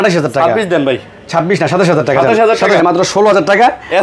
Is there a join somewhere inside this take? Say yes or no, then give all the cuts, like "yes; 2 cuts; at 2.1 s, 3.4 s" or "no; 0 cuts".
yes; 1 cut; at 2.8 s